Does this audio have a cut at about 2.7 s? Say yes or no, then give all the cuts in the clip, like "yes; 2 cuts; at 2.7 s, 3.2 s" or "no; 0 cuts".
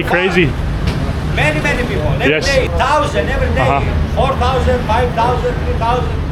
yes; 1 cut; at 2.7 s